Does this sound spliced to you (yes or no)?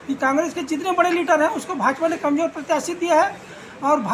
no